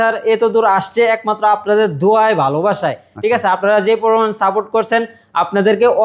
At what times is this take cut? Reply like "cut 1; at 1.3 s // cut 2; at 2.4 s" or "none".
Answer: none